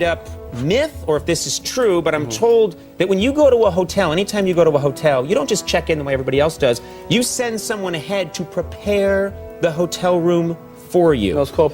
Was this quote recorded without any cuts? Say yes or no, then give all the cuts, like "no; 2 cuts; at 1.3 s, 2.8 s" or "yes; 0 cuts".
yes; 0 cuts